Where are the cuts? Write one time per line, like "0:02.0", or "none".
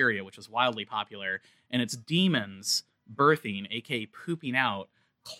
none

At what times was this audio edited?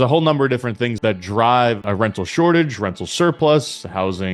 0:00.9
0:01.8

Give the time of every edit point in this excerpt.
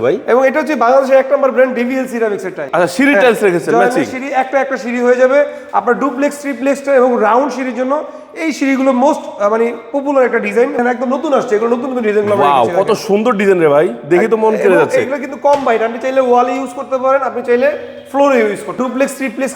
0:02.6
0:10.8
0:18.8

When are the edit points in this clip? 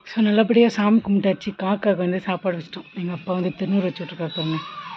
none

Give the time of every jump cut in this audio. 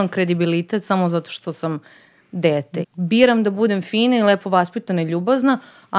0:02.8

